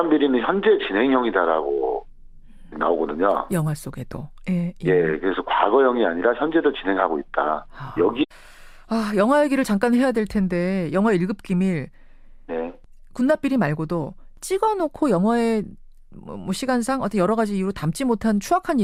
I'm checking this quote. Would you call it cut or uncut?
uncut